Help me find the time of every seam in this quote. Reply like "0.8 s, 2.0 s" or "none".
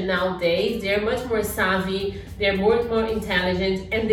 none